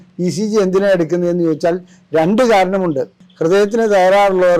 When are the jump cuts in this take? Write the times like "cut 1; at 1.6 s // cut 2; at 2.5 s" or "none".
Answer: cut 1; at 3.2 s

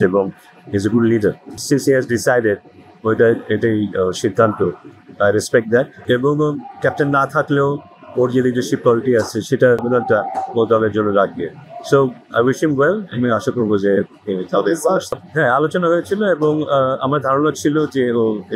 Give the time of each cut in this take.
cut 1; at 1.5 s // cut 2; at 6.0 s // cut 3; at 9.8 s

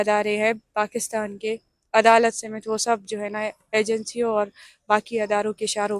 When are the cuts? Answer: none

